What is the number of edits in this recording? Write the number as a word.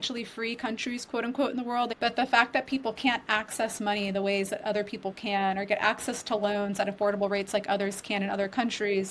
one